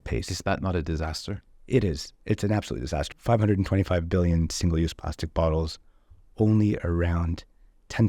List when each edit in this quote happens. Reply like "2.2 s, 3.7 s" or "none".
3.1 s